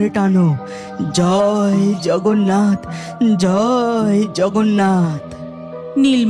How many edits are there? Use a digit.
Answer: 0